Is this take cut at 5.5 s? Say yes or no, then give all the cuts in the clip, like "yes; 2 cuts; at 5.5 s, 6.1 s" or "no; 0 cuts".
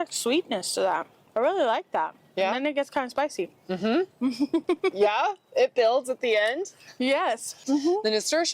no; 2 cuts; at 1.2 s, 7.6 s